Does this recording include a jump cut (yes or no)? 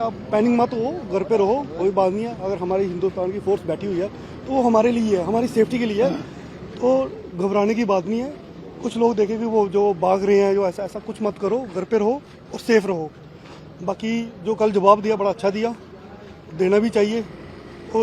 no